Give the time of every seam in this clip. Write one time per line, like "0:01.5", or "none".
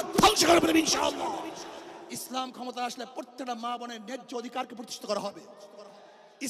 0:02.1